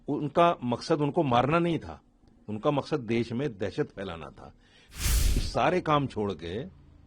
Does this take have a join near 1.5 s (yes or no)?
no